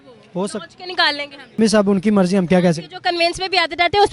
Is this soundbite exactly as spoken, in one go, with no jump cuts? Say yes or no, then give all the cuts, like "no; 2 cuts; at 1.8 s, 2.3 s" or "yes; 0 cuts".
no; 1 cut; at 1.6 s